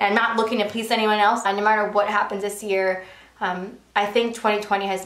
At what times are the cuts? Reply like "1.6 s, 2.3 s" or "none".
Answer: 1.5 s